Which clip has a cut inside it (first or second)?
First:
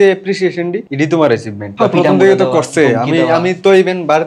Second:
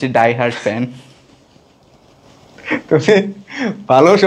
first